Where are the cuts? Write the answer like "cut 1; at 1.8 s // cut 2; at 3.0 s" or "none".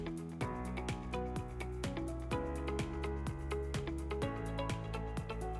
none